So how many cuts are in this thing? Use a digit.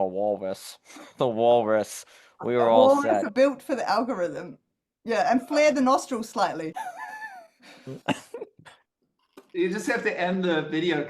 2